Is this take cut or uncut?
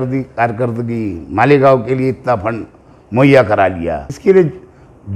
cut